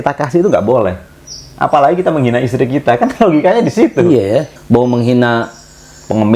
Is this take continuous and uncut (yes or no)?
no